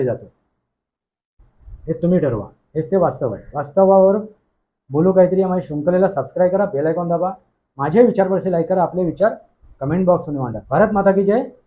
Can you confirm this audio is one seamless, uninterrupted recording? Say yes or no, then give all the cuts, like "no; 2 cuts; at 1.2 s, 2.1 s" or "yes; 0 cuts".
no; 1 cut; at 10.5 s